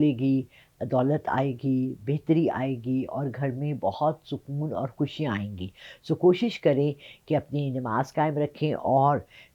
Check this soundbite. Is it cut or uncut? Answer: uncut